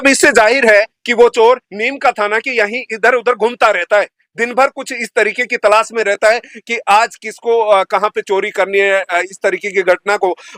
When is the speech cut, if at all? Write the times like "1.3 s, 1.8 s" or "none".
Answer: none